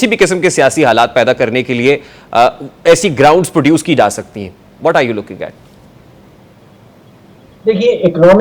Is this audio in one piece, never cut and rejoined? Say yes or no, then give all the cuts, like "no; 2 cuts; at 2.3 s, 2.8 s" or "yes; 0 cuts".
yes; 0 cuts